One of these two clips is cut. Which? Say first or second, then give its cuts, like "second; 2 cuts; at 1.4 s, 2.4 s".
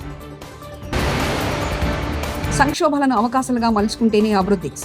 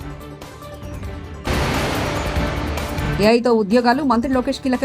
first; 2 cuts; at 0.9 s, 2.5 s